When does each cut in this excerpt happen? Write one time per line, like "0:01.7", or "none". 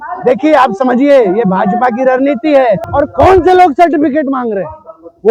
0:02.9